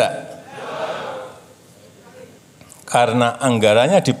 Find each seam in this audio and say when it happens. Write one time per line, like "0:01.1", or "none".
0:02.4

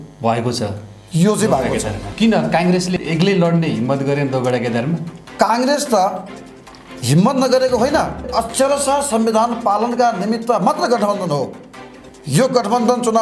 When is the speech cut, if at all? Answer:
0:02.0
0:08.2

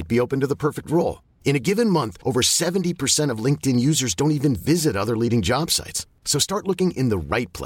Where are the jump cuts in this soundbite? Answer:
none

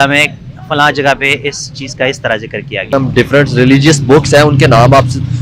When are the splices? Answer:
0:02.9

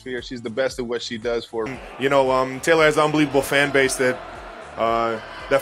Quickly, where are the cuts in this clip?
0:01.7

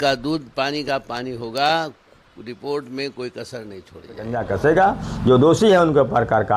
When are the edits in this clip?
0:04.4

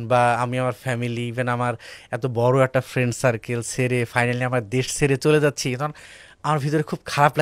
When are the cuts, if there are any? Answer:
none

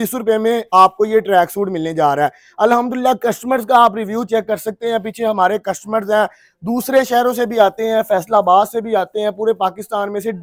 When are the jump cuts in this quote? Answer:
none

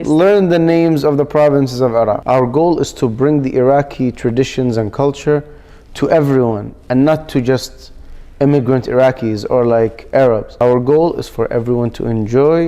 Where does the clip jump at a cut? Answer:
0:02.2
0:10.5

